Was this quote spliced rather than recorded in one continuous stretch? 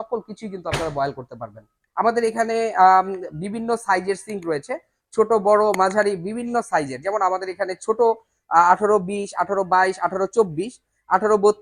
yes; 1 cut; at 1.7 s

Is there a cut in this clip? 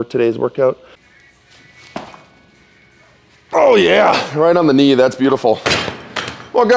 yes; 1 cut; at 1.1 s

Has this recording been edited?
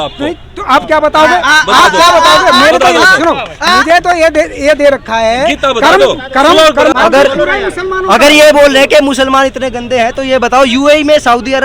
yes; 1 cut; at 6.9 s

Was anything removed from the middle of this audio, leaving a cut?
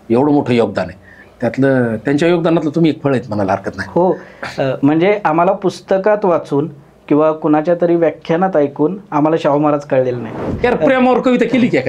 yes; 1 cut; at 10.4 s

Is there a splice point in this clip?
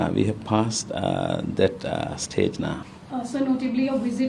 no; 0 cuts

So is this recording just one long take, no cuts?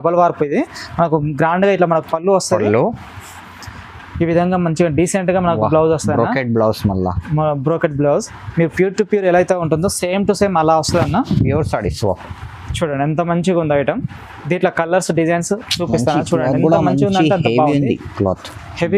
yes; 0 cuts

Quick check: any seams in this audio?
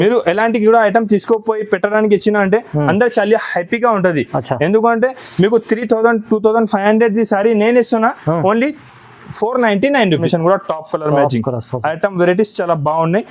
yes; 1 cut; at 10.2 s

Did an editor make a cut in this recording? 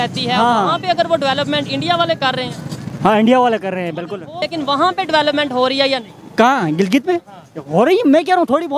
yes; 1 cut; at 4.4 s

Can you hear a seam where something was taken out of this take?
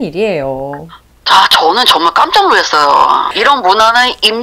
yes; 1 cut; at 3.3 s

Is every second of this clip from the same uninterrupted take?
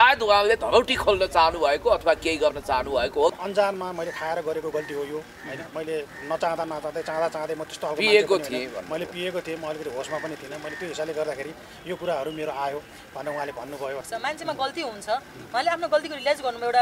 no; 2 cuts; at 3.3 s, 14.1 s

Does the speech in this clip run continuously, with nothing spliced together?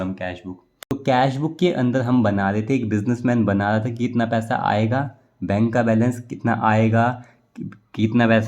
no; 1 cut; at 0.9 s

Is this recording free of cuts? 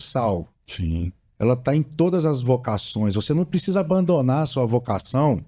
yes; 0 cuts

